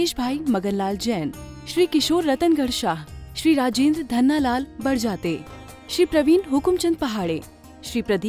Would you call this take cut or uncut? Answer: uncut